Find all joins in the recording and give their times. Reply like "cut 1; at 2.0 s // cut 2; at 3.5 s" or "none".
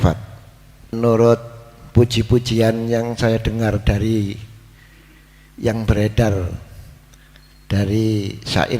cut 1; at 0.9 s